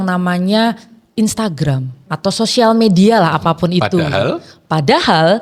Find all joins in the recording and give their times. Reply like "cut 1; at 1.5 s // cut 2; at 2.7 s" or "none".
cut 1; at 2.0 s